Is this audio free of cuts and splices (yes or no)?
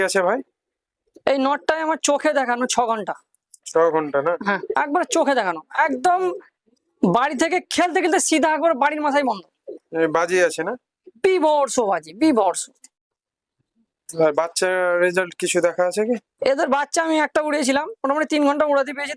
yes